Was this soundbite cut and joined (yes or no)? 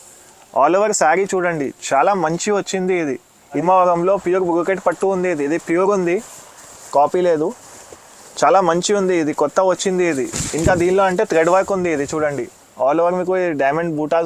yes